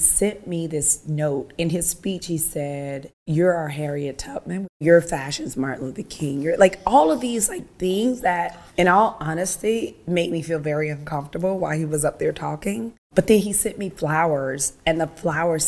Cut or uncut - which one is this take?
cut